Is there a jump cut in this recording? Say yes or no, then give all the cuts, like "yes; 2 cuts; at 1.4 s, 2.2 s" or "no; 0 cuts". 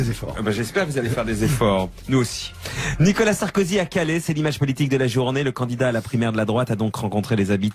no; 0 cuts